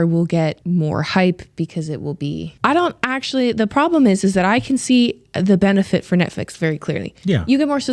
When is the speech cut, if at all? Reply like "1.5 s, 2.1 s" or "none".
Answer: 2.5 s